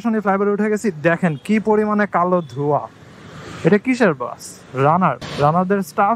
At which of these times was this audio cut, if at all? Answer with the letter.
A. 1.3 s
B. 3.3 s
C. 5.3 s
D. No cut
C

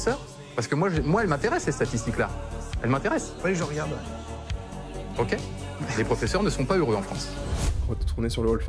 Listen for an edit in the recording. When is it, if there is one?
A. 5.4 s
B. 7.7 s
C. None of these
B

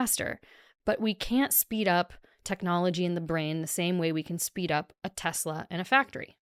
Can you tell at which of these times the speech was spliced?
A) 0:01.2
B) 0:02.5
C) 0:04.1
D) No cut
D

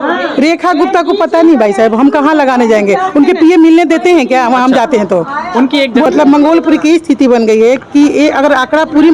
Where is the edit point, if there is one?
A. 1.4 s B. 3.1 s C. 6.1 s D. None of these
C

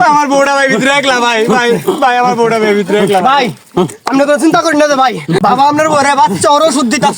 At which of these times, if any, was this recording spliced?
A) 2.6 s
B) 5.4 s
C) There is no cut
B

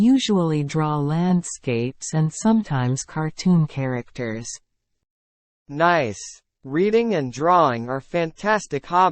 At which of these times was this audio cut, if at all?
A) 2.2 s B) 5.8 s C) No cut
B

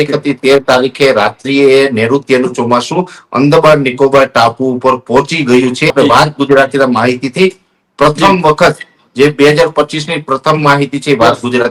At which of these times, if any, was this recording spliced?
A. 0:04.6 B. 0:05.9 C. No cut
B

